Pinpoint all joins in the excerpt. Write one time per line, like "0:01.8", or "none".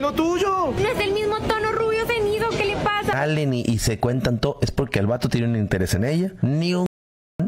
0:03.1